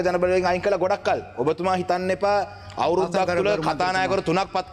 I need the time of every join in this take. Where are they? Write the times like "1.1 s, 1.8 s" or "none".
none